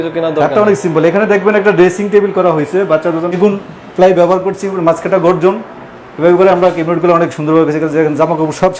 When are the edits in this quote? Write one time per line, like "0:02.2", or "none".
0:03.3